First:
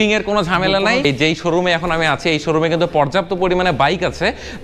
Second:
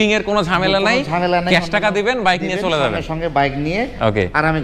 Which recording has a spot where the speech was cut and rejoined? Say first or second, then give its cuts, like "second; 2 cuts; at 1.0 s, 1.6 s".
first; 1 cut; at 1.0 s